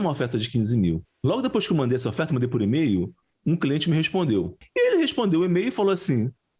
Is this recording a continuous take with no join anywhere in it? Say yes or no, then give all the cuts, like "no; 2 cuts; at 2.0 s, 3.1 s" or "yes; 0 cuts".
no; 2 cuts; at 1.1 s, 4.6 s